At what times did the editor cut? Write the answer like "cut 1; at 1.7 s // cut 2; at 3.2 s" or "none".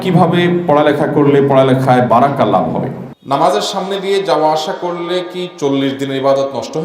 cut 1; at 3.0 s